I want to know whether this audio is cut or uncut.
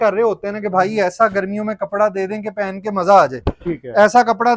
uncut